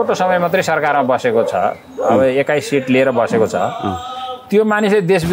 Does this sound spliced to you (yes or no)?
no